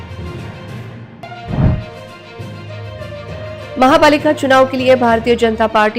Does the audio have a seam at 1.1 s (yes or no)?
yes